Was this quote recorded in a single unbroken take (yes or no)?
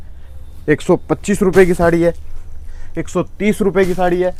yes